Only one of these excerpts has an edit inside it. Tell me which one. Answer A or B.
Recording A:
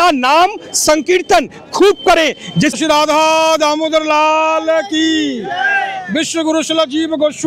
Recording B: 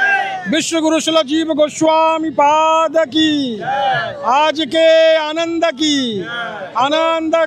A